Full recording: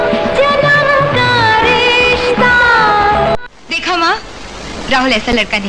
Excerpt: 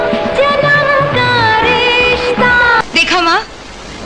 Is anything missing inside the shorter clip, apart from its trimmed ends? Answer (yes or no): yes